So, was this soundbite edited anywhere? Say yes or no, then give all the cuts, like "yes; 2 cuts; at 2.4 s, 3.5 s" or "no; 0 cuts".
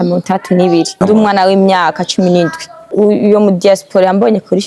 yes; 2 cuts; at 0.9 s, 2.9 s